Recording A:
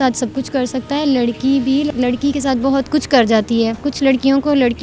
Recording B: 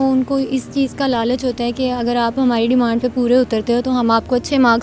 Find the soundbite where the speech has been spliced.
A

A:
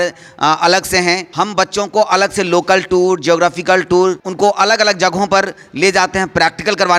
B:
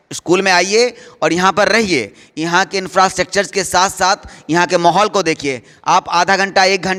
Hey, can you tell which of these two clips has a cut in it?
A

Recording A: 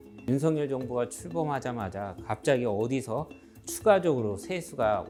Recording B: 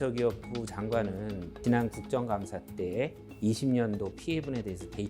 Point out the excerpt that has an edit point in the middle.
B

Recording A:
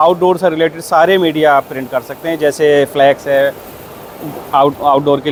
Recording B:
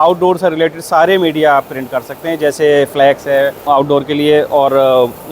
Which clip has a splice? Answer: B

